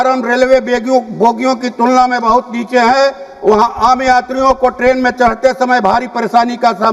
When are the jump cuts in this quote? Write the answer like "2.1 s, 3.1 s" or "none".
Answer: none